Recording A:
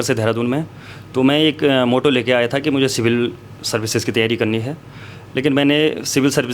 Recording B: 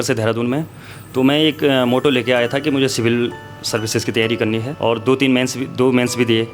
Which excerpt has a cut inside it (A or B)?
B